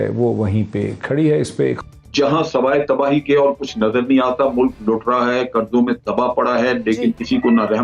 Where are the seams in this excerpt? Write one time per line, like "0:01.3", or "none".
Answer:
0:01.8